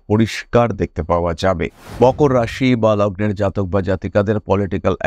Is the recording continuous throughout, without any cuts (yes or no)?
no